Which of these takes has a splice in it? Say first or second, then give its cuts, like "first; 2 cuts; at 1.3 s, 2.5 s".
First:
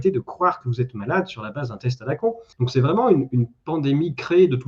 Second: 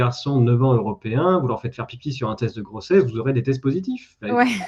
first; 1 cut; at 2.5 s